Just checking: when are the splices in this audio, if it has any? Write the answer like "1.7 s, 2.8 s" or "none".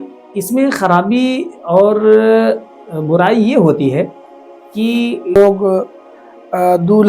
5.4 s